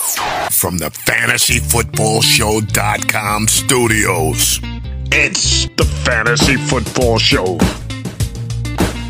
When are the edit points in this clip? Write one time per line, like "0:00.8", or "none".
none